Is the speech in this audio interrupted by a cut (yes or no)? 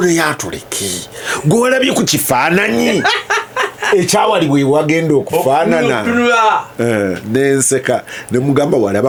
no